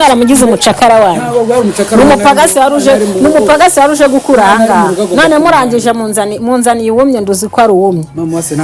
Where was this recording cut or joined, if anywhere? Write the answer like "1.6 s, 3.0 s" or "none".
none